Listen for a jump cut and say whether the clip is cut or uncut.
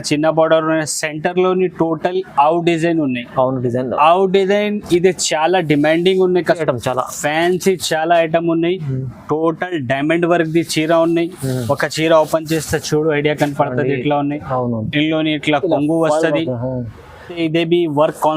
cut